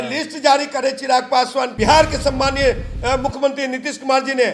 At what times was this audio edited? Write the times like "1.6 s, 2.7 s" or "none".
1.7 s